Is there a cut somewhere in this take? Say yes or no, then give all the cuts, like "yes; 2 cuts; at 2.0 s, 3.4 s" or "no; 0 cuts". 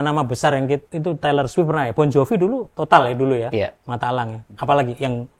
yes; 1 cut; at 0.9 s